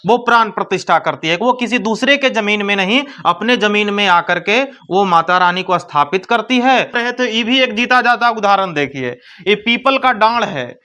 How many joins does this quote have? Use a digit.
1